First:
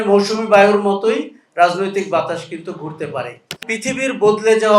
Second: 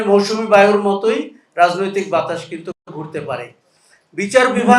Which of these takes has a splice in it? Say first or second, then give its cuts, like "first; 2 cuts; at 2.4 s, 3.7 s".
first; 2 cuts; at 2.8 s, 3.6 s